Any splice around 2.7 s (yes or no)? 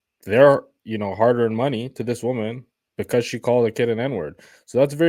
no